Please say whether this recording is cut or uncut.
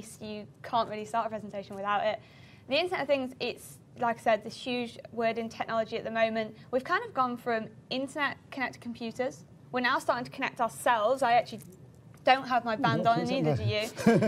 cut